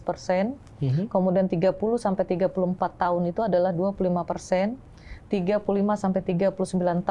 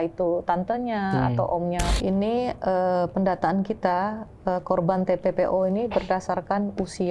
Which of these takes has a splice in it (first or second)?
second